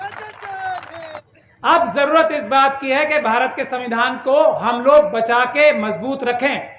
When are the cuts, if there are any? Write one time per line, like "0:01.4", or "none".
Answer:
0:01.2

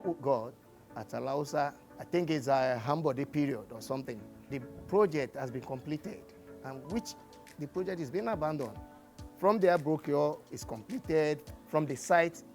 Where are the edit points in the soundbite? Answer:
0:04.5

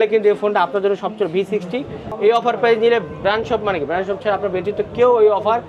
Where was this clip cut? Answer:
0:02.0

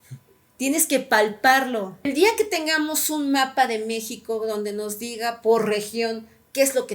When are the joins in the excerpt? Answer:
0:02.1

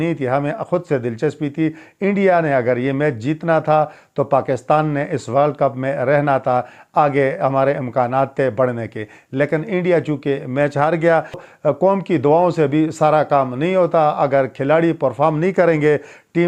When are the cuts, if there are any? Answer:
none

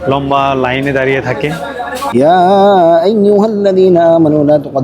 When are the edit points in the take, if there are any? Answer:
0:02.0

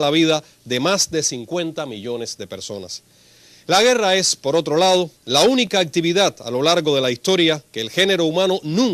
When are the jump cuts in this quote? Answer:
0:04.0

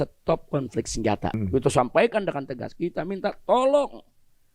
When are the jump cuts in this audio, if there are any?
0:01.4

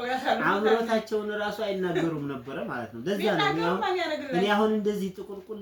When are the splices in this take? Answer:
none

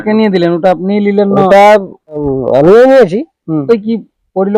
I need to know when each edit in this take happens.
0:02.2
0:03.6

